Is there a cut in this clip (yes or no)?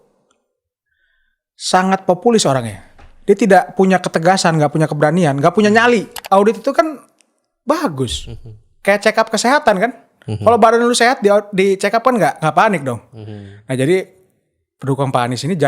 yes